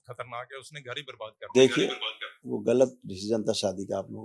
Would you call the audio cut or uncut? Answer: uncut